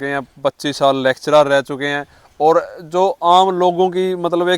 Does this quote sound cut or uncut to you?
uncut